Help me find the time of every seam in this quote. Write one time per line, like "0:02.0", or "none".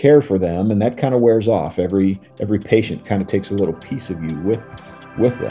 none